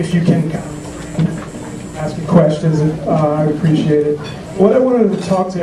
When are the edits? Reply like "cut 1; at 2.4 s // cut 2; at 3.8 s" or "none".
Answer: cut 1; at 2.1 s